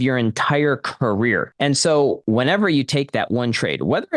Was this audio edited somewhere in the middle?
yes; 2 cuts; at 1.5 s, 2.2 s

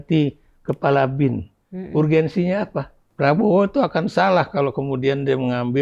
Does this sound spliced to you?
yes; 1 cut; at 3.0 s

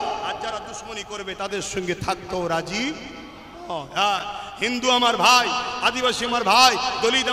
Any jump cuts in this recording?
no; 0 cuts

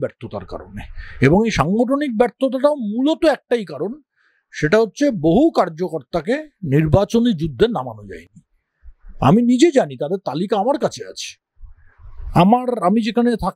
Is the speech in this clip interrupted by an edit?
no; 0 cuts

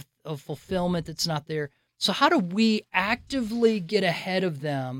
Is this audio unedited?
yes; 0 cuts

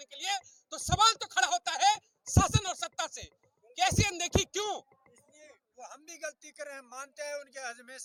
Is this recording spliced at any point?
no; 0 cuts

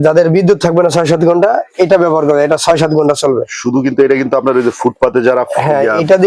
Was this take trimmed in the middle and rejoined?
no; 0 cuts

